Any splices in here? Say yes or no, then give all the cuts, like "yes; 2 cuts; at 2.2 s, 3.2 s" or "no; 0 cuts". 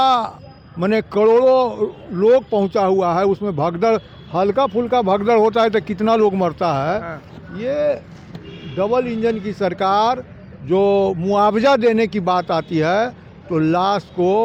no; 0 cuts